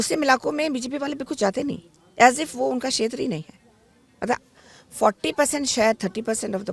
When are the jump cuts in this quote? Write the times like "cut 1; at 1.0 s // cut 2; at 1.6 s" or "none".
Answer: none